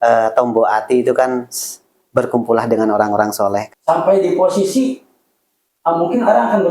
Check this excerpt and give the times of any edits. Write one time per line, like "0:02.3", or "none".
0:03.6